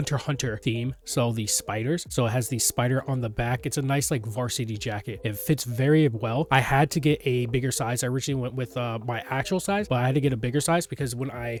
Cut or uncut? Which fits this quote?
uncut